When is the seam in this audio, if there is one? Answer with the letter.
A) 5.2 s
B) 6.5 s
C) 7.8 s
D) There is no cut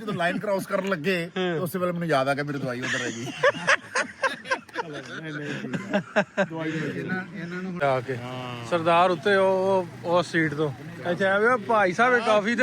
C